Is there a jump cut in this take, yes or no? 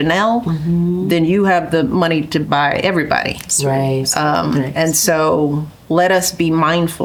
no